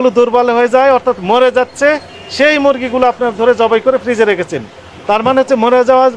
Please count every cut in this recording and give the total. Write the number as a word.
zero